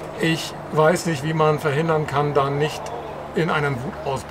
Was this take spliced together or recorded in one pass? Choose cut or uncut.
uncut